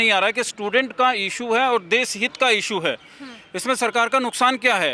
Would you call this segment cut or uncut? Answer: uncut